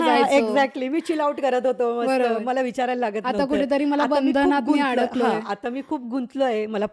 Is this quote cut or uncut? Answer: uncut